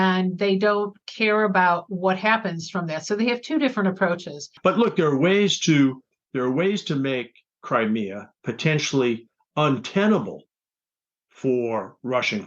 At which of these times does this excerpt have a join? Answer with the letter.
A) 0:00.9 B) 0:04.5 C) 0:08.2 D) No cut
B